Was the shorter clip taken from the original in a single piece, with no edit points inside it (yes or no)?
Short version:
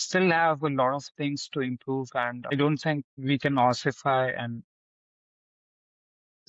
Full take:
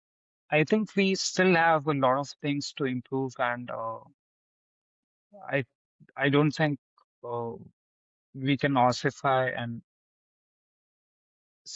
no